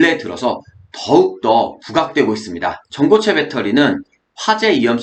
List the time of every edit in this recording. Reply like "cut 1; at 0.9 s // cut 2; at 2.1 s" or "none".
none